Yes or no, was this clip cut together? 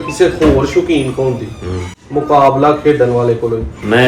no